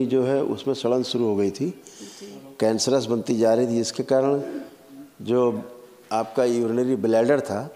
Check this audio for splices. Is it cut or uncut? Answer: uncut